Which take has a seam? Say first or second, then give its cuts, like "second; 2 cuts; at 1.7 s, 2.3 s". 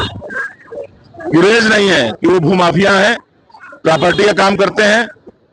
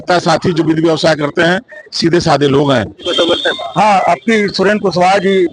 second; 1 cut; at 3.1 s